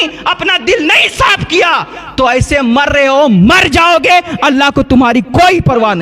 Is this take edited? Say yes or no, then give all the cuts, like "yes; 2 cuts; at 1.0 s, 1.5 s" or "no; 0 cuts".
no; 0 cuts